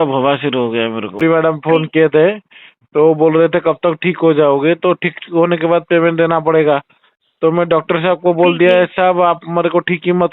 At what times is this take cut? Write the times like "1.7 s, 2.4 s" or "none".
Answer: 1.2 s